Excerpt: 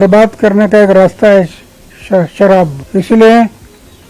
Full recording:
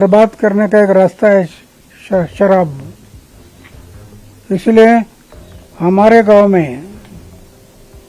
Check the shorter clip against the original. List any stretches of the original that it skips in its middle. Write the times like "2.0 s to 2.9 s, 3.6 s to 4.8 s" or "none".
2.8 s to 4.4 s